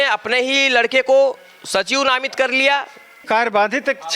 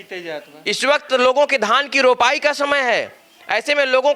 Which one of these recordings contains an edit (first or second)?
first